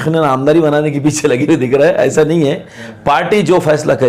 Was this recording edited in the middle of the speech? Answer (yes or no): no